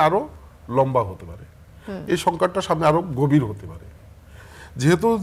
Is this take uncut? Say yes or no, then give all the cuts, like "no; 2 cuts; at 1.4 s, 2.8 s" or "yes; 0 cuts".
yes; 0 cuts